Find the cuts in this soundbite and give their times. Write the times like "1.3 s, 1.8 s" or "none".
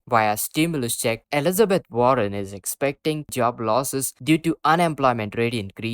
1.2 s, 3.3 s